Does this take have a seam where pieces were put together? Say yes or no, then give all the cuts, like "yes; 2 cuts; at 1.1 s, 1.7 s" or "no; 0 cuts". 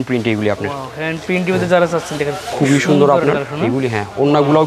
no; 0 cuts